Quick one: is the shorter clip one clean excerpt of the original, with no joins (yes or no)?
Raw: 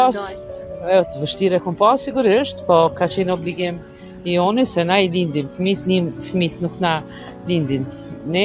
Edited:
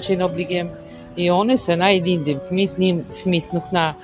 yes